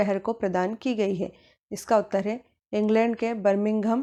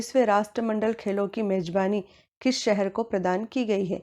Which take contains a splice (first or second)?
second